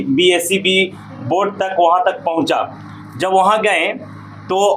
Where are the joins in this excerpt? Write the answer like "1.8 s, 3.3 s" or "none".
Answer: none